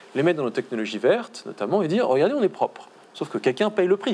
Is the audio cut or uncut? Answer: uncut